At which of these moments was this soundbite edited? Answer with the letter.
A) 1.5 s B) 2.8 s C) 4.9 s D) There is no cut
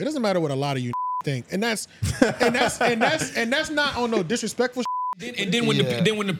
C